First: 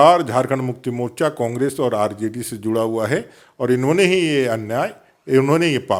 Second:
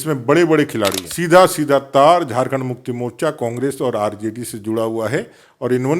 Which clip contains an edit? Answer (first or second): second